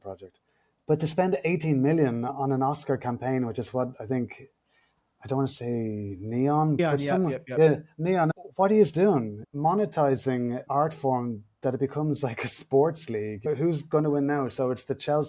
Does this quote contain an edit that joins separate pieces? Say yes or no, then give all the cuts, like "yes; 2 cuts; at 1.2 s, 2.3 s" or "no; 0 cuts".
yes; 1 cut; at 10.7 s